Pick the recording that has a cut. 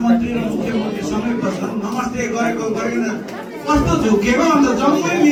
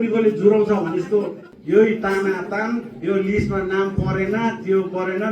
second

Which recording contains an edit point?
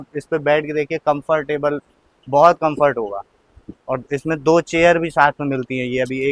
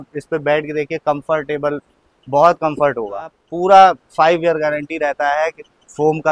second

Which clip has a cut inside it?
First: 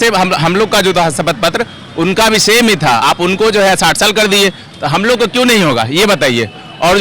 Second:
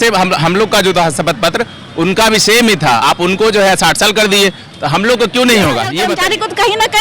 second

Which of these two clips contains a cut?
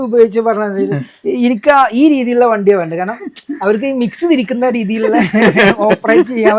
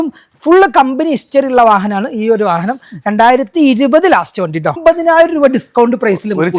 second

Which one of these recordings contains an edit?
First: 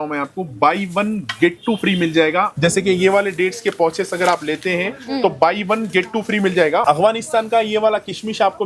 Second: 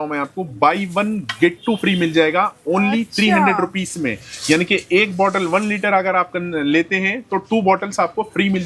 first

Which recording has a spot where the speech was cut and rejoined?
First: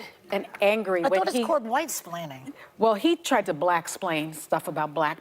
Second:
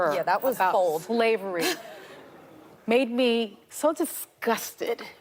first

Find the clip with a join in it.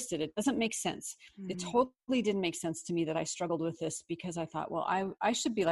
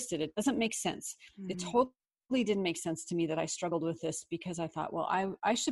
first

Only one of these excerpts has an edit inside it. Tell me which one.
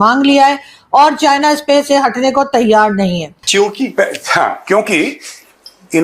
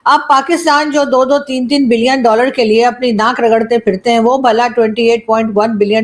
first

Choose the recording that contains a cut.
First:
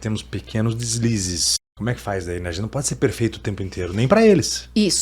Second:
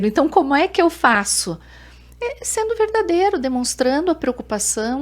first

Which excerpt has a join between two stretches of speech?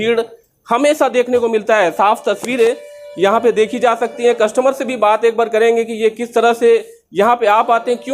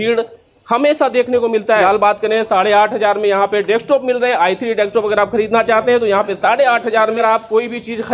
second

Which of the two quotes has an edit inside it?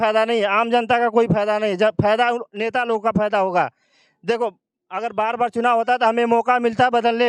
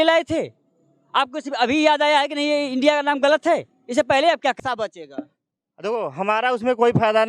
second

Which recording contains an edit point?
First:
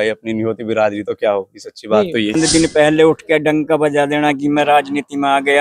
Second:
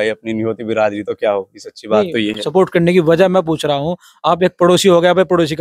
first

